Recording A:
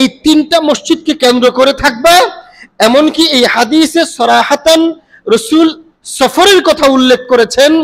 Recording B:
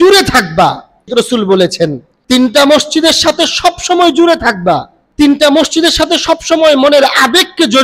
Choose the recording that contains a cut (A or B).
B